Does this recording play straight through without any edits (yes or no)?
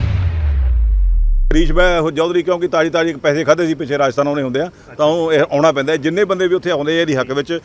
no